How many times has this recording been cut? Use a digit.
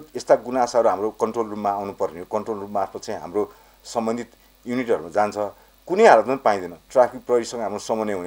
1